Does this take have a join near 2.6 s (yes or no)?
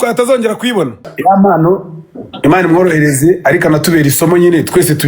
no